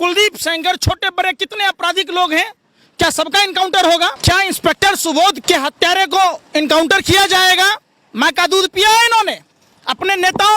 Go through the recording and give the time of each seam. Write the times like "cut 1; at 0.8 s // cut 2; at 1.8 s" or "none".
cut 1; at 4.2 s // cut 2; at 5.4 s